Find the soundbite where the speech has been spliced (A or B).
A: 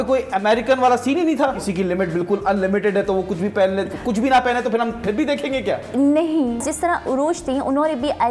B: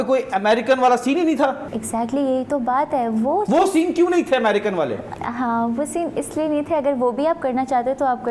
A